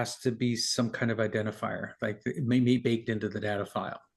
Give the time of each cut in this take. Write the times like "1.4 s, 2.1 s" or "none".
2.8 s